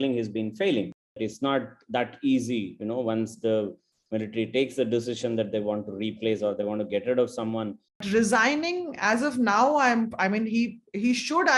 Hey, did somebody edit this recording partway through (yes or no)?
yes